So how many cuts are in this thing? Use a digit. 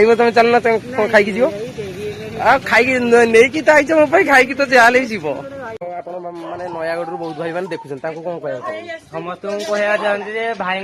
1